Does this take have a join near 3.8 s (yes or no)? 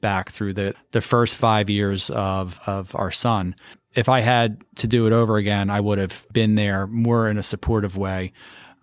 yes